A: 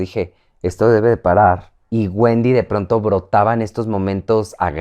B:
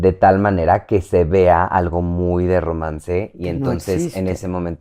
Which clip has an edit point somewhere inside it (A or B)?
A